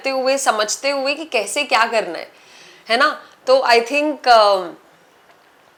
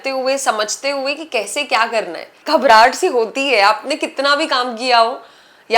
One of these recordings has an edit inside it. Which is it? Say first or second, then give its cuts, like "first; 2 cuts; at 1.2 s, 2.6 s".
second; 1 cut; at 2.4 s